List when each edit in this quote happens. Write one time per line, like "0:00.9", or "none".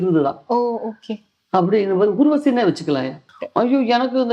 0:03.2